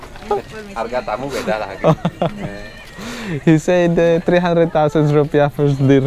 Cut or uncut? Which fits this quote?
uncut